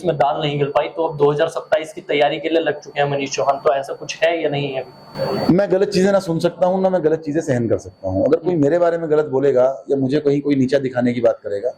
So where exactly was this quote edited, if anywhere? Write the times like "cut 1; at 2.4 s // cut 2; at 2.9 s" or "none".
cut 1; at 5.0 s